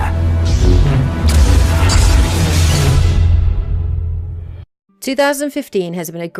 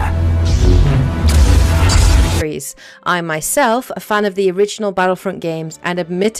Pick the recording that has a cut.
first; 1 cut; at 2.4 s

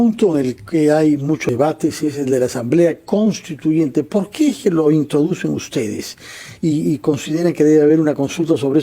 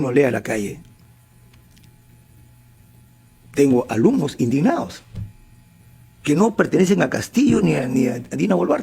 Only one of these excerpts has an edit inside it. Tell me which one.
first; 1 cut; at 1.5 s

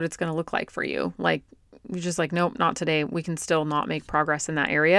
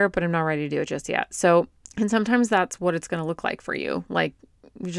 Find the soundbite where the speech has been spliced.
second; 1 cut; at 1.8 s

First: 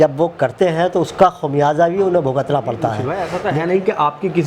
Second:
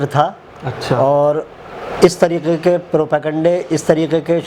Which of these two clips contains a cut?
first; 1 cut; at 3.1 s

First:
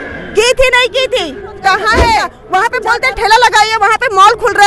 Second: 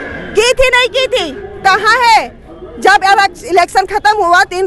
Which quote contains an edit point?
first; 1 cut; at 2.4 s

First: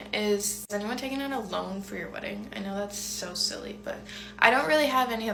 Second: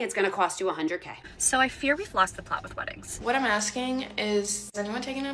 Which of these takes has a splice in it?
second; 2 cuts; at 1.1 s, 3.0 s

